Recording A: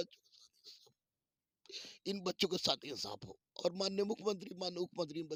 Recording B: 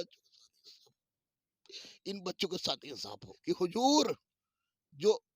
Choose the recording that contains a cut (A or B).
B